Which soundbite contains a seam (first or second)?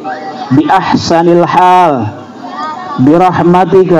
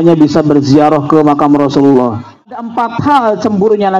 second